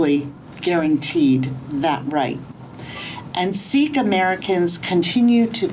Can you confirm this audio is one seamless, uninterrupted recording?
yes; 0 cuts

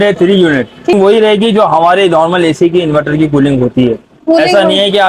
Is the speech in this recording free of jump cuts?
no; 1 cut; at 0.9 s

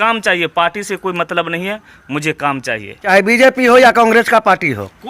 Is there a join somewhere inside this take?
yes; 1 cut; at 3.1 s

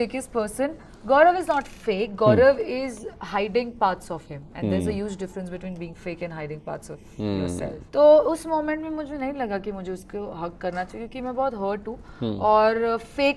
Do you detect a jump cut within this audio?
yes; 1 cut; at 7.8 s

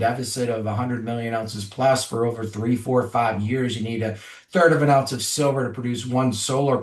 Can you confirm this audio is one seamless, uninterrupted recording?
yes; 0 cuts

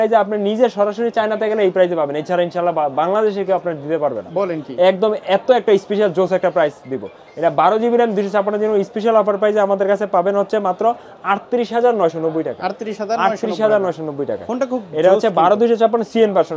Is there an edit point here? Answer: no; 0 cuts

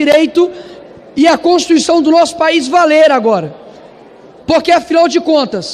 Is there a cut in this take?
no; 0 cuts

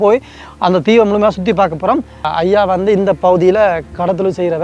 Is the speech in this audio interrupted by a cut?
yes; 1 cut; at 2.2 s

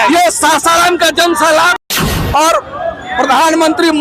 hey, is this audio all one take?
no; 1 cut; at 1.9 s

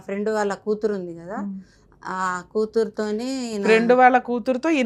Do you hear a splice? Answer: no; 0 cuts

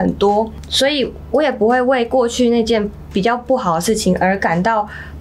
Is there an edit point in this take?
no; 0 cuts

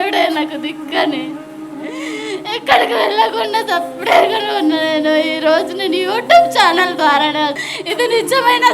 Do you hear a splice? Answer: yes; 1 cut; at 7.6 s

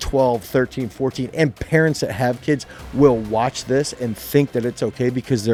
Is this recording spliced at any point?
no; 0 cuts

